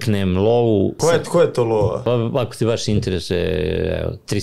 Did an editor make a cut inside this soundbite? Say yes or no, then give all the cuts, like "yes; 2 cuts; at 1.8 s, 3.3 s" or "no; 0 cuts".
yes; 2 cuts; at 1.0 s, 2.0 s